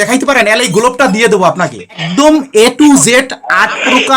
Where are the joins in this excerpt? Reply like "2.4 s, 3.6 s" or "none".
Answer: 2.0 s

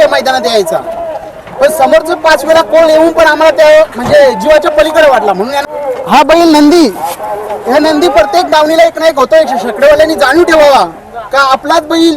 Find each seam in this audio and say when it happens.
5.6 s

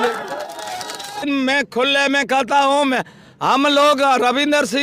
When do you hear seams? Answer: 1.2 s

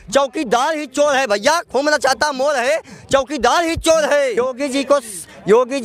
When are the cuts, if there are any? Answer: 4.4 s

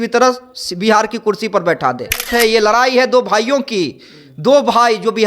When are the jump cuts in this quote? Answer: 2.3 s

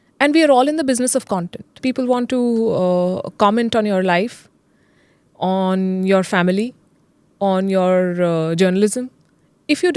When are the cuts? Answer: 1.8 s

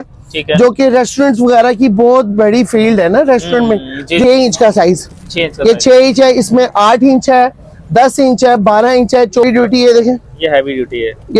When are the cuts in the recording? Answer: 4.2 s, 9.4 s

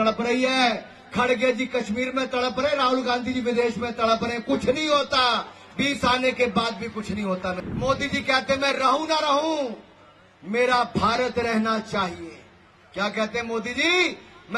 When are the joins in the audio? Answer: 7.6 s

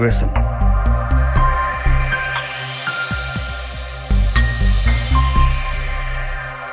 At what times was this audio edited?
none

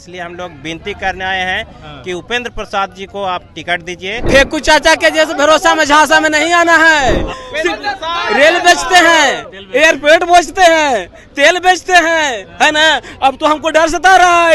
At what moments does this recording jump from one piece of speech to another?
4.2 s, 7.3 s

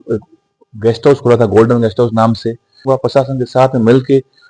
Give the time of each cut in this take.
2.8 s

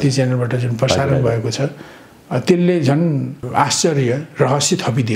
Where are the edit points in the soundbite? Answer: 3.4 s

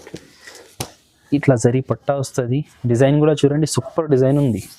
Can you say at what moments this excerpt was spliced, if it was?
1.3 s

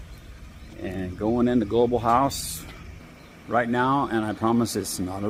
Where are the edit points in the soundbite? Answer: none

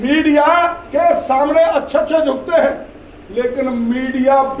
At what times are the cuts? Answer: none

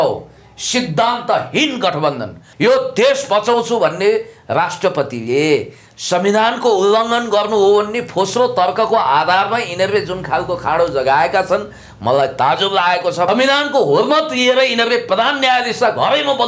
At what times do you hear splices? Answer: 2.4 s, 13.3 s

